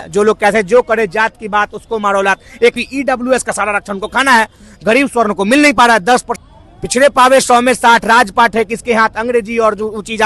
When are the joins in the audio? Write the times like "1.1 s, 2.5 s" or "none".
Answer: 2.8 s, 6.4 s